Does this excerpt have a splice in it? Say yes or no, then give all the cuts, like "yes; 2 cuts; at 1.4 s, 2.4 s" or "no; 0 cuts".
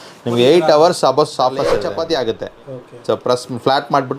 yes; 1 cut; at 1.9 s